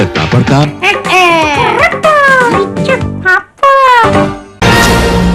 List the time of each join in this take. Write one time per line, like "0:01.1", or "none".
0:04.4